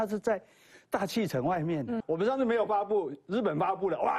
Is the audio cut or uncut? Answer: cut